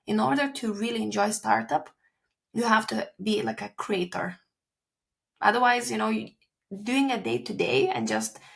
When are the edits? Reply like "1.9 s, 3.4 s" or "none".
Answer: none